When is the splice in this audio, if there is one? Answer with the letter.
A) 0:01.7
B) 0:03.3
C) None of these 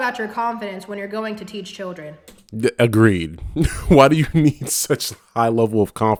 C